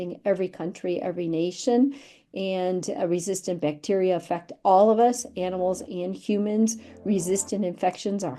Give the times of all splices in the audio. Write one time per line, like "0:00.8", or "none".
none